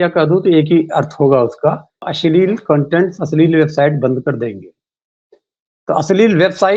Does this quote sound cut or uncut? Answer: cut